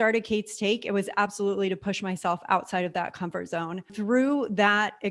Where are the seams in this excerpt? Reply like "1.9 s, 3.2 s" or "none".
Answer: 3.9 s